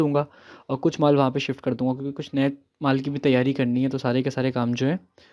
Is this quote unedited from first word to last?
yes; 0 cuts

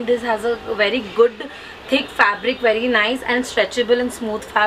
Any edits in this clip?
no; 0 cuts

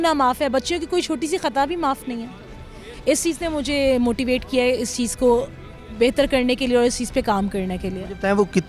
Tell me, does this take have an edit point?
no; 0 cuts

